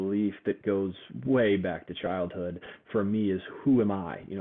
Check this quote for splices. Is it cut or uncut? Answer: cut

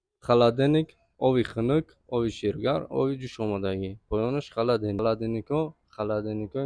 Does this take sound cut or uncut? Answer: cut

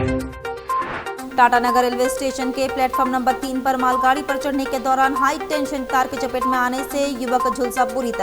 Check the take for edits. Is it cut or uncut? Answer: cut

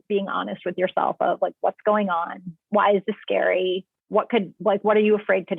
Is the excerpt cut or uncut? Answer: uncut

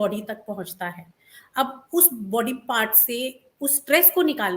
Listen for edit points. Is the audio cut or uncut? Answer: uncut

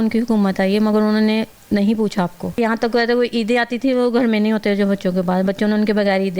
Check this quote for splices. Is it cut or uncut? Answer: cut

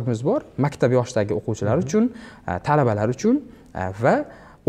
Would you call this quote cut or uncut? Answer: uncut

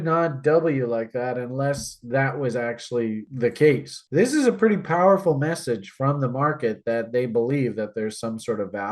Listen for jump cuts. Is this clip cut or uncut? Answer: cut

